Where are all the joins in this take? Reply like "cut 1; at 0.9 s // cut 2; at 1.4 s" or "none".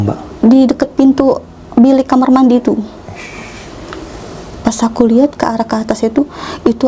none